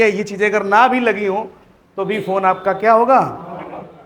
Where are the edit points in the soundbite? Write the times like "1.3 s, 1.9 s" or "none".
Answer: none